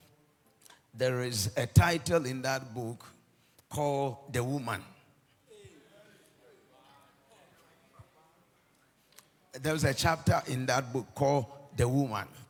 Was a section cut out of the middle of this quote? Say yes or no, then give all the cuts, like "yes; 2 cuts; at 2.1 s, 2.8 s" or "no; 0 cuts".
no; 0 cuts